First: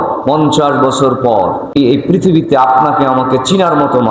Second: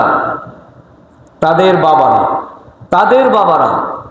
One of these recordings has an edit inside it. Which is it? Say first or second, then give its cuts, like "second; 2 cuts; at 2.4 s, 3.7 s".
first; 1 cut; at 1.8 s